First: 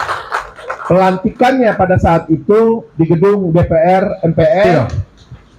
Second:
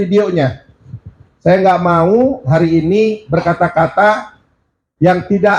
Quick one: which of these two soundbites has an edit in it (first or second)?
first